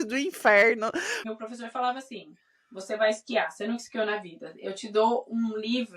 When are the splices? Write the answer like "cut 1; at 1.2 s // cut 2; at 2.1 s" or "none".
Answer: cut 1; at 1.2 s